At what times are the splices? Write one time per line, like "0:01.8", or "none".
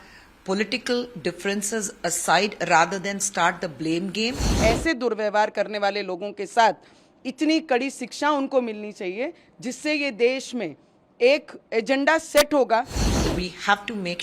0:04.5
0:13.0